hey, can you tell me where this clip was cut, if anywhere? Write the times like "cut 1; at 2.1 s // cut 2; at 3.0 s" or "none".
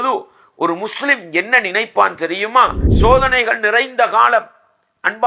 cut 1; at 2.8 s